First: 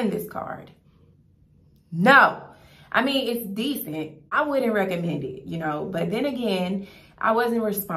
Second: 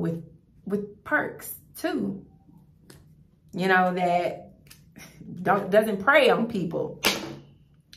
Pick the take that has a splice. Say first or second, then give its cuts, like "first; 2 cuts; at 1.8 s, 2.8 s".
first; 1 cut; at 4.3 s